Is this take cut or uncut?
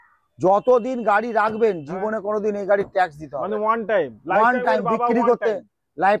uncut